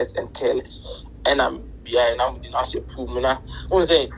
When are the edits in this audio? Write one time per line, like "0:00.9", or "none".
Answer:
0:01.7